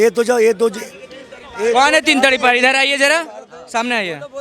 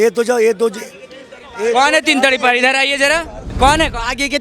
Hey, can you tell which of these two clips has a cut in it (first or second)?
second